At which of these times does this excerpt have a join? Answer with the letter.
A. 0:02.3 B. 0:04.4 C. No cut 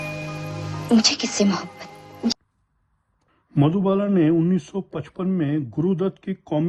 A